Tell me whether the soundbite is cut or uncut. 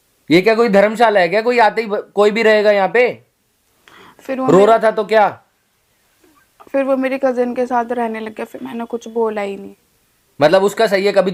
uncut